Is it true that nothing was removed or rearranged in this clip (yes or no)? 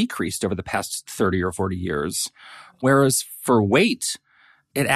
yes